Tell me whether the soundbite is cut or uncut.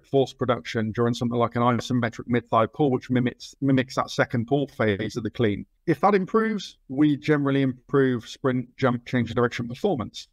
uncut